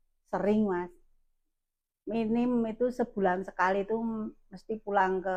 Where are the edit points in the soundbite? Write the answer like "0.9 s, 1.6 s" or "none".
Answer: none